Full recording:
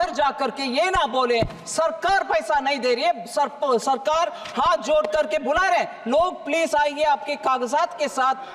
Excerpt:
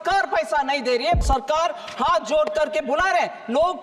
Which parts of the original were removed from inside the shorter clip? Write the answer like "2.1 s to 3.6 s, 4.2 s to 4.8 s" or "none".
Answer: 3.2 s to 3.8 s